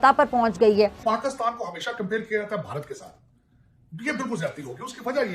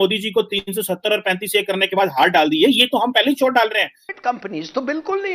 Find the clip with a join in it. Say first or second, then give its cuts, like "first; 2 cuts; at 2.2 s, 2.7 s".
second; 1 cut; at 4.0 s